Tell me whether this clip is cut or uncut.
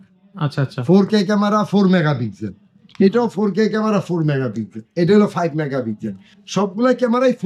uncut